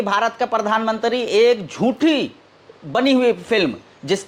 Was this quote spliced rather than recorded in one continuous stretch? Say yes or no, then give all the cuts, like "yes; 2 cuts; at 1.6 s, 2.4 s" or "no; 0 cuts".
no; 0 cuts